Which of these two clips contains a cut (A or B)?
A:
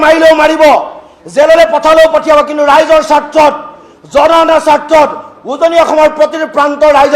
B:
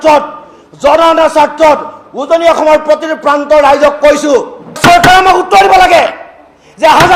B